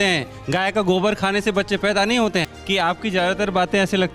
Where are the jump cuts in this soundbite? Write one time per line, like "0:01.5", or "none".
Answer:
0:02.5